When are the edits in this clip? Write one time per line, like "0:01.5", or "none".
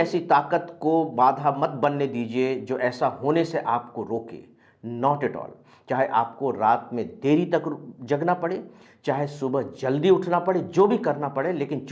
none